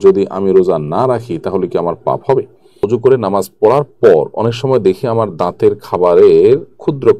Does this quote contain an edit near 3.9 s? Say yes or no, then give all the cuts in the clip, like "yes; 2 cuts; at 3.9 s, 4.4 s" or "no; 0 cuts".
no; 1 cut; at 2.6 s